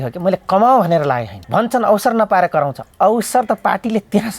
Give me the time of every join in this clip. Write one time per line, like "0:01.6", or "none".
0:01.3
0:02.8